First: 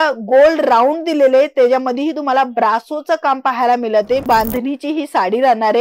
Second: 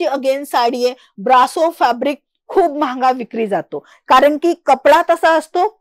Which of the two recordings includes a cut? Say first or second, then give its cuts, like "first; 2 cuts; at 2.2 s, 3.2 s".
first; 1 cut; at 4.2 s